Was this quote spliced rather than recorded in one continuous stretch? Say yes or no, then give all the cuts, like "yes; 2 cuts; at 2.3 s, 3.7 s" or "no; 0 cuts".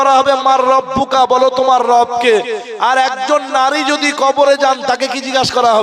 no; 0 cuts